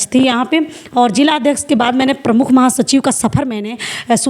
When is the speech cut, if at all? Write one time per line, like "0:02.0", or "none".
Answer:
none